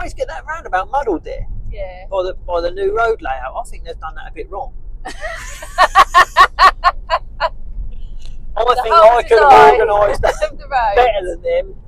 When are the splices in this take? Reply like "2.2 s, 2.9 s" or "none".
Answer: none